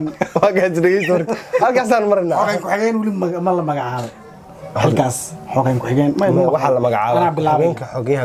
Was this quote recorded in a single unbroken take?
yes; 0 cuts

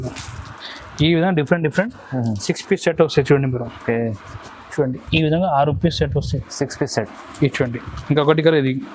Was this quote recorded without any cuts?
yes; 0 cuts

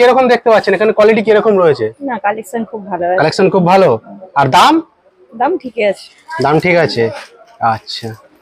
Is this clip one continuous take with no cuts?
yes; 0 cuts

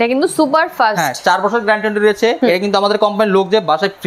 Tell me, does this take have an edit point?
yes; 1 cut; at 2.4 s

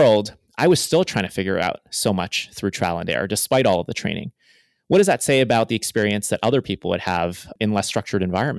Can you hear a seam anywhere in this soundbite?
yes; 1 cut; at 7.6 s

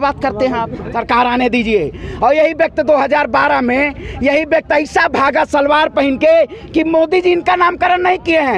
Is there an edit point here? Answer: yes; 1 cut; at 0.9 s

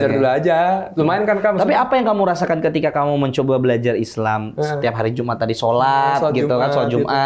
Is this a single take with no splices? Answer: yes; 0 cuts

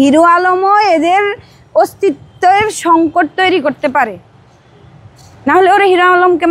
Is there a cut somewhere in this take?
no; 0 cuts

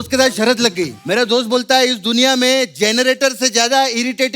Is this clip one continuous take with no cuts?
no; 1 cut; at 1.0 s

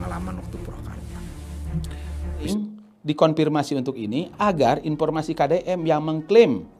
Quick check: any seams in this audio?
yes; 1 cut; at 2.5 s

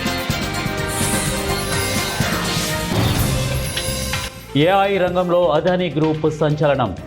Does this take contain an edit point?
yes; 1 cut; at 4.2 s

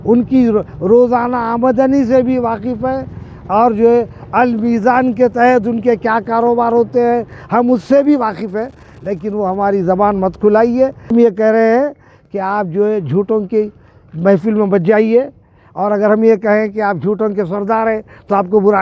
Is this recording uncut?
no; 1 cut; at 11.1 s

